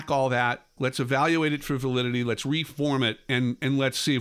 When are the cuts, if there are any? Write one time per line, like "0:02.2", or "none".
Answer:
none